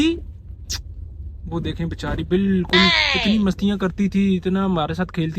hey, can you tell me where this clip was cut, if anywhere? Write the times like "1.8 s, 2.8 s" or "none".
none